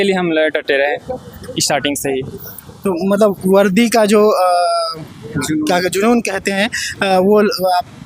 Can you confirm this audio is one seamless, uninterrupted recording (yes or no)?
yes